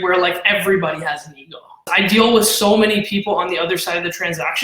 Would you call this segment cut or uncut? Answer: cut